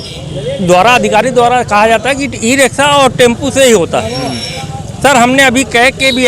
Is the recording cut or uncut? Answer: uncut